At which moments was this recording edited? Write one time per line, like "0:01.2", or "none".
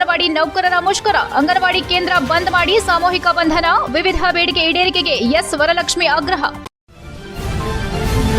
0:06.7